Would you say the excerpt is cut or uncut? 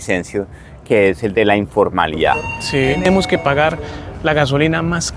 cut